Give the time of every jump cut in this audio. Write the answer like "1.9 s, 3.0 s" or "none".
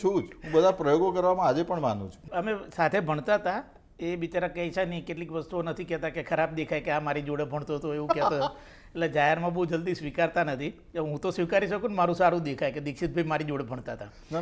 2.2 s

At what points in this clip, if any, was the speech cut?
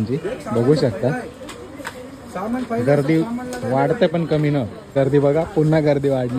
4.8 s

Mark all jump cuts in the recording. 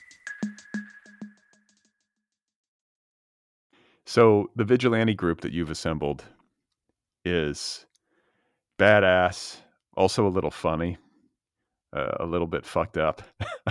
none

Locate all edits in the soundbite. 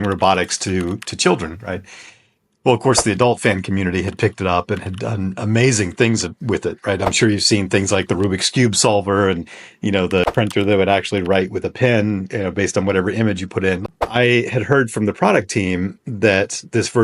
10.2 s, 13.8 s

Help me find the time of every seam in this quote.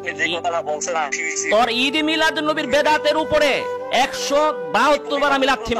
none

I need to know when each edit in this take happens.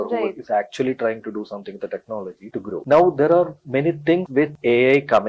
2.8 s

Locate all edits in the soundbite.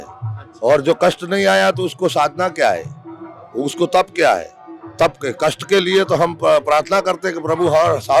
none

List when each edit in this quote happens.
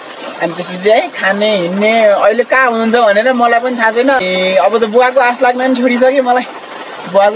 4.2 s

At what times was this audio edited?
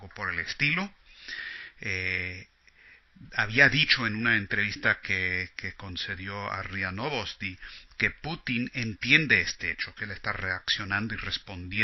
5.0 s

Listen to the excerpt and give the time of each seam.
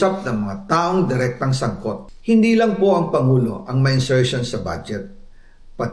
2.1 s

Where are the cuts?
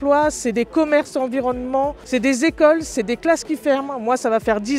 none

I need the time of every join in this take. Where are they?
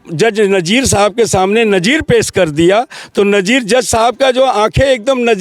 none

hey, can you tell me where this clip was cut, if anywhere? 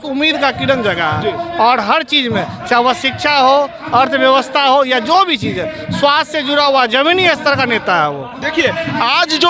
none

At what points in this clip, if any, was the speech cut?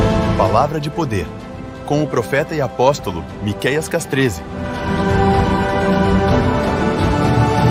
none

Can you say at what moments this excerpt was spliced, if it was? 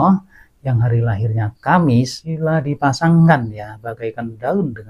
2.2 s

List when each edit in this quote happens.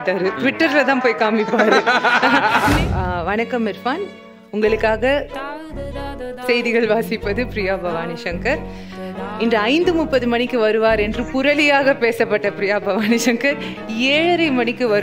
2.8 s

